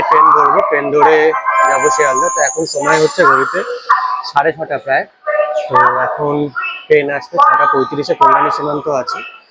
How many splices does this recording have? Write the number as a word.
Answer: zero